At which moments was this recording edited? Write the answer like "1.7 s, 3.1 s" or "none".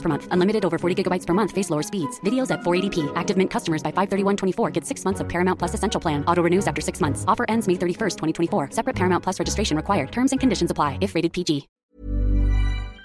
11.7 s